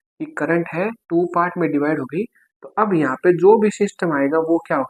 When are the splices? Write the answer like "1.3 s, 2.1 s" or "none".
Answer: none